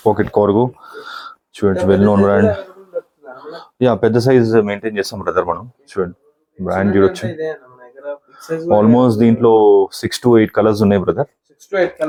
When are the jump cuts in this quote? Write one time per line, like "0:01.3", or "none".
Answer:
none